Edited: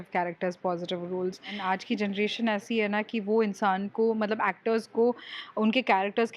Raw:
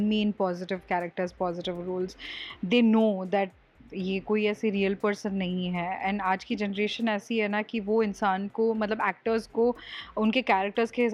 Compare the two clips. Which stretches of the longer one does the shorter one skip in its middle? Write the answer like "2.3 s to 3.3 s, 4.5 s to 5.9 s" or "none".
2.3 s to 6.2 s